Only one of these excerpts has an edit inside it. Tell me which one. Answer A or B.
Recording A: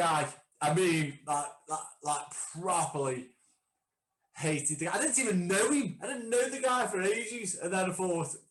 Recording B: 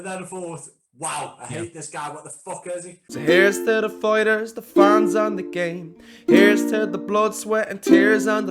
B